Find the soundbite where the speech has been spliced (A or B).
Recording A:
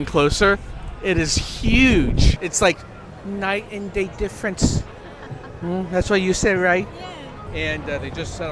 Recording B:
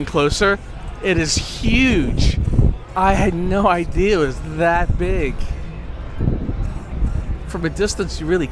A